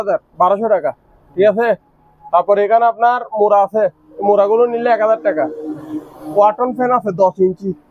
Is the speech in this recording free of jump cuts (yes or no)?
yes